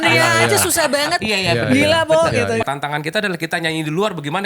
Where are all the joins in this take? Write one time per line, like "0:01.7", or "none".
0:02.6

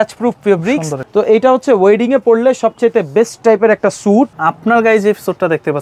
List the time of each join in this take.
0:01.0
0:04.5

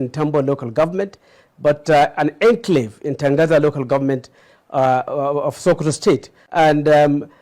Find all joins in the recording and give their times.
0:06.4

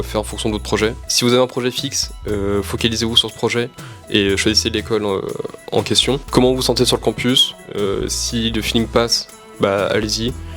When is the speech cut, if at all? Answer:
0:06.2

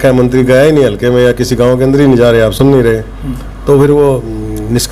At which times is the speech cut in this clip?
none

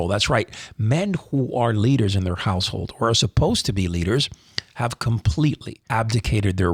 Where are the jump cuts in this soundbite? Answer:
0:05.7

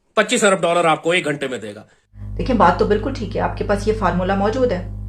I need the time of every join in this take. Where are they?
none

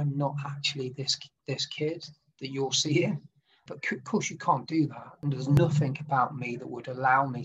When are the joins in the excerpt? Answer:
0:05.2

